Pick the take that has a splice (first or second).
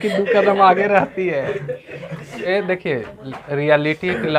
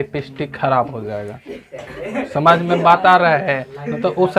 first